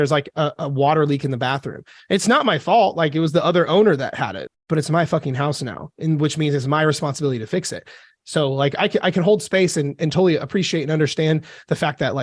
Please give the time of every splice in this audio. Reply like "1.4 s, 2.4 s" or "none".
4.4 s